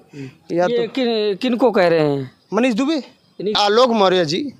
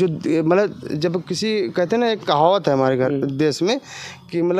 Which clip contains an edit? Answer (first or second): first